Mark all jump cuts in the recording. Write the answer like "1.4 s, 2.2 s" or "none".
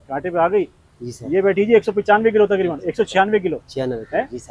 none